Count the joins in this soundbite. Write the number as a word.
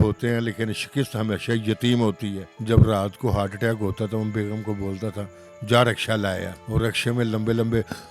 two